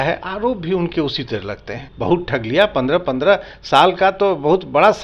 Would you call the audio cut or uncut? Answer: cut